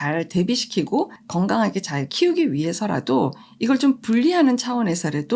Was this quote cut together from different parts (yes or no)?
yes